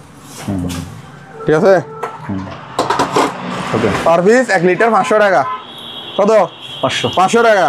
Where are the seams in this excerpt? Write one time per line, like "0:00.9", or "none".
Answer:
0:04.0